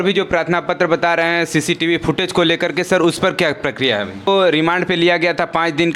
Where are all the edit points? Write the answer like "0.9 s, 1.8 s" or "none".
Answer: 4.3 s

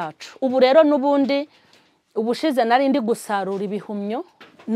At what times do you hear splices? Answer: none

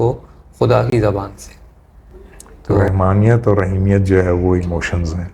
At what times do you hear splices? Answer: 2.9 s

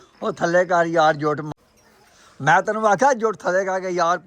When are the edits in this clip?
1.4 s

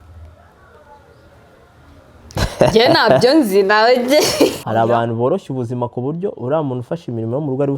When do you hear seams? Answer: 4.6 s

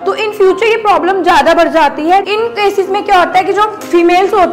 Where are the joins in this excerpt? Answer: 2.3 s

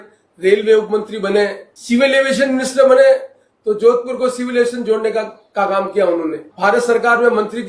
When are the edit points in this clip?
1.7 s, 6.4 s

